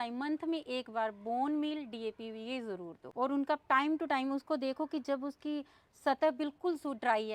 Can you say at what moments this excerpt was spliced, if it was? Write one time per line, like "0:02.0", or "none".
0:03.0

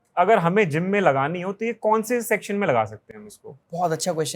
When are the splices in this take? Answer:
none

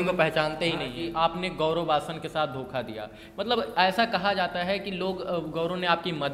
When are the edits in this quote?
0:01.0

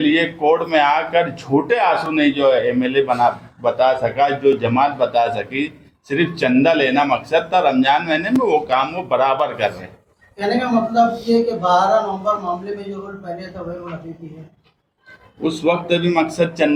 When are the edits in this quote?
none

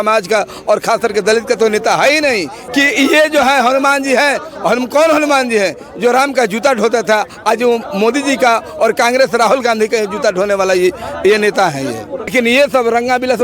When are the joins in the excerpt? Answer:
0:02.6
0:12.3

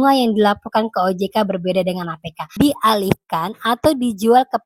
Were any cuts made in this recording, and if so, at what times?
0:02.5

